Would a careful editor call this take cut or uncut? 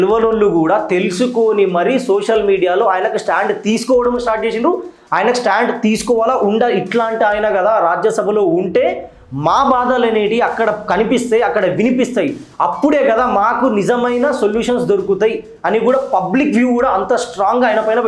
uncut